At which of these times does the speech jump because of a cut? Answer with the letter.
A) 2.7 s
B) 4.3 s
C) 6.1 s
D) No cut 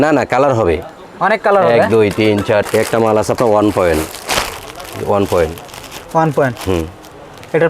A